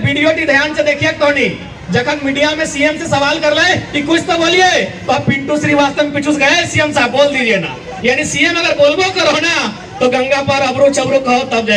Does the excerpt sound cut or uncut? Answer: uncut